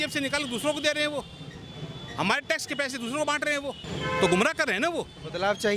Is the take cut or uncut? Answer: uncut